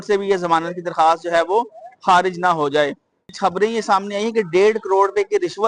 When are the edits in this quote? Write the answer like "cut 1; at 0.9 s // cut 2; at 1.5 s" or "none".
cut 1; at 3.3 s